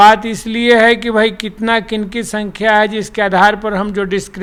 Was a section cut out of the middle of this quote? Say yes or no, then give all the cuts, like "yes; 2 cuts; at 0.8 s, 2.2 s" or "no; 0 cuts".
no; 0 cuts